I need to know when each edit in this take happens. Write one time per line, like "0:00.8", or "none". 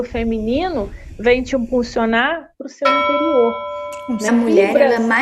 0:04.3